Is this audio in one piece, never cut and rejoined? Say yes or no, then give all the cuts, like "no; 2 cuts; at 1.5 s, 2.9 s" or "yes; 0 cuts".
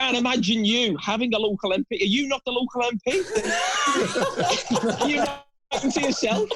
yes; 0 cuts